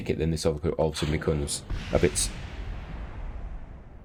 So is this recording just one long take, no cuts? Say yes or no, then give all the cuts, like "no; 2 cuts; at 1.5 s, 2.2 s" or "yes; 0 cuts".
yes; 0 cuts